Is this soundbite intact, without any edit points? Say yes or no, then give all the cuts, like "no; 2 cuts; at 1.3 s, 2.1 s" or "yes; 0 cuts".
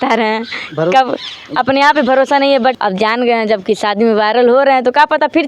no; 1 cut; at 2.8 s